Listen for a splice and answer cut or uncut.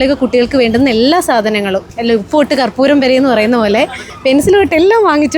uncut